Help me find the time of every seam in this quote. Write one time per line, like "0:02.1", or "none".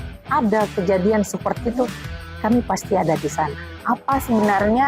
0:03.7